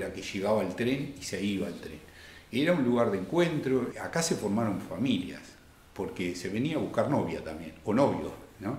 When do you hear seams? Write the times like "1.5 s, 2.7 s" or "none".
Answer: 3.9 s